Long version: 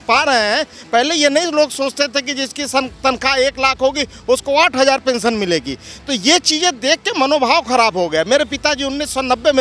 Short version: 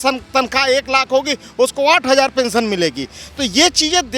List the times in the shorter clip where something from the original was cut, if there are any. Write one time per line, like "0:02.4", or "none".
none